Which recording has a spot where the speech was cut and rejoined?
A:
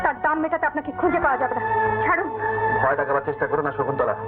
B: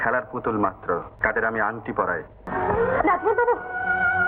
B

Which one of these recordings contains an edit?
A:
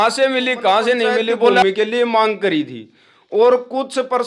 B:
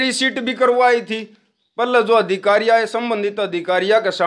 A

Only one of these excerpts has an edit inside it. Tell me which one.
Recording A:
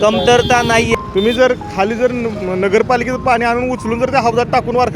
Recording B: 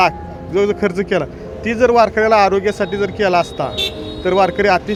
A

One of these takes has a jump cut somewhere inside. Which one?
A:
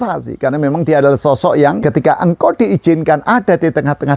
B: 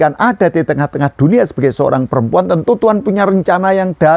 A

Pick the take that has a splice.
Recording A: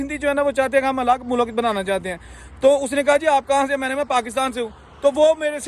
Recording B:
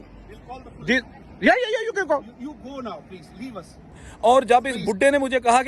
B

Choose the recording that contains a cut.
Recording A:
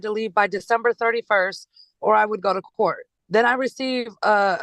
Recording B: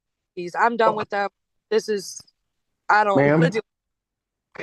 A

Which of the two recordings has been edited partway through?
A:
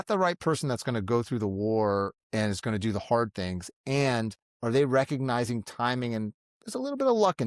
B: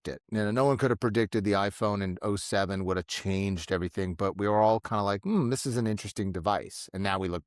A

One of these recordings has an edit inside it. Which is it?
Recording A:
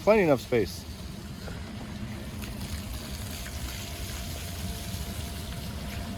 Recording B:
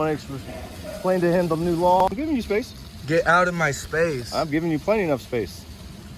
B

